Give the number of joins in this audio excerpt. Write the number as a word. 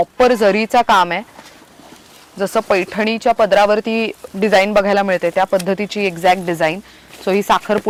zero